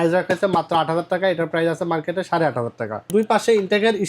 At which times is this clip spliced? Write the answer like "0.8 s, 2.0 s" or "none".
3.1 s